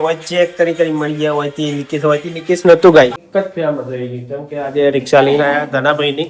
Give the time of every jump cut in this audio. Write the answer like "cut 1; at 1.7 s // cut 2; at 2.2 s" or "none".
cut 1; at 3.2 s